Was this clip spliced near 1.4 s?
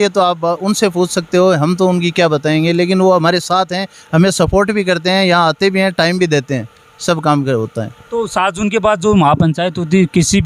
no; 0 cuts

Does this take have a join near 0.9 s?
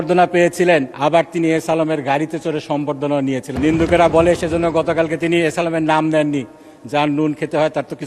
yes; 2 cuts; at 0.9 s, 3.5 s

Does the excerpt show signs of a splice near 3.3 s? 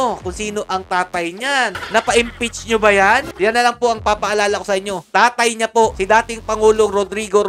yes; 2 cuts; at 1.8 s, 3.3 s

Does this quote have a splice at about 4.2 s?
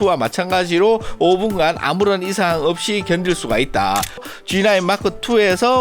yes; 1 cut; at 4.2 s

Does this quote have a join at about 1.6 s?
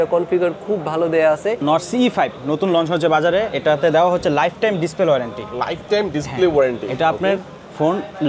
yes; 1 cut; at 1.6 s

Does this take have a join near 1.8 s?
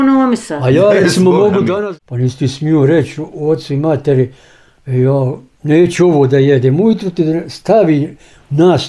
yes; 1 cut; at 1.8 s

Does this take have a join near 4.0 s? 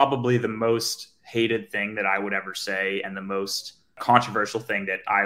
yes; 1 cut; at 4.0 s

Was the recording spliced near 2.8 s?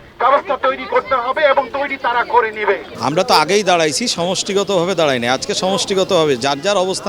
no; 0 cuts

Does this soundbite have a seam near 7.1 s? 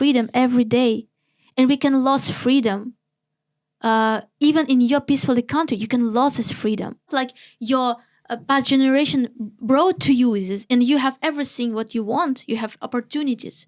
yes; 1 cut; at 7.1 s

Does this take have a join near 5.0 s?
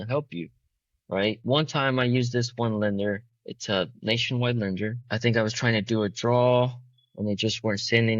yes; 1 cut; at 5.0 s

